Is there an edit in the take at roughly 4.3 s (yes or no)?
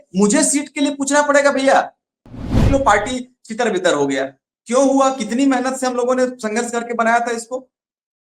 no